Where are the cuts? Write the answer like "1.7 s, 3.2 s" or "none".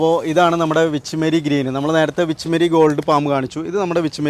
none